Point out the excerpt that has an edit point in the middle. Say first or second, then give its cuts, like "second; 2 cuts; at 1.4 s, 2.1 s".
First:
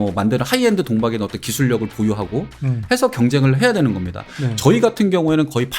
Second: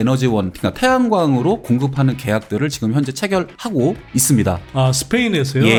first; 1 cut; at 4.3 s